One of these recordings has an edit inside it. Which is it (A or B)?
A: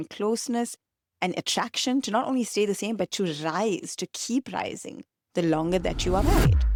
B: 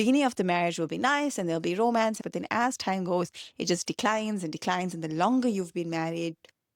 B